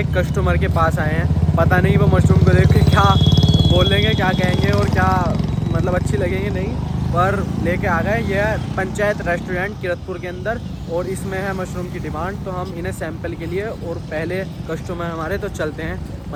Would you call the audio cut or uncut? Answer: uncut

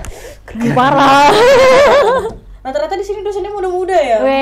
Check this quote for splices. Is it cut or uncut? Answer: cut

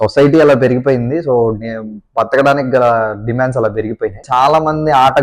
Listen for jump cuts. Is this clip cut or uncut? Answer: cut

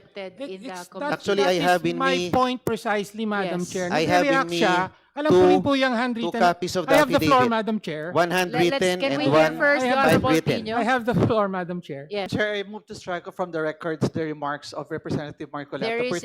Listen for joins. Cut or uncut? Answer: cut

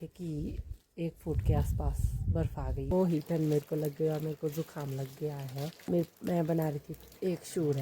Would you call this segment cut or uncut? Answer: cut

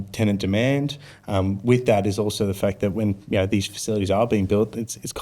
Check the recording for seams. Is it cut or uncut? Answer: uncut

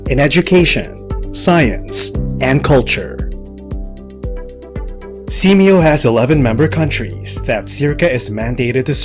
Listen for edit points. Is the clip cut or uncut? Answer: uncut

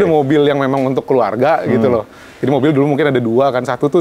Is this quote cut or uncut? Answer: uncut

